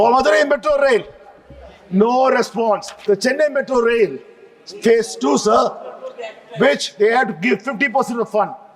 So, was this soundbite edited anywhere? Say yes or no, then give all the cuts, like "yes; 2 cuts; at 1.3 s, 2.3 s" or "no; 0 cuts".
yes; 1 cut; at 2.9 s